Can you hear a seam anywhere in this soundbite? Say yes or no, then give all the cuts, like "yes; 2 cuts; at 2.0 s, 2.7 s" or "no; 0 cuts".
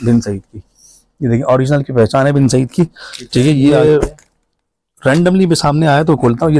yes; 1 cut; at 3.8 s